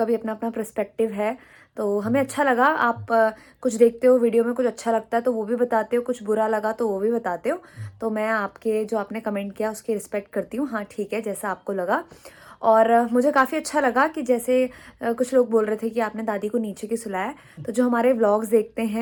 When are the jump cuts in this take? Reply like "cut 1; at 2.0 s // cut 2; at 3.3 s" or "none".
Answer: none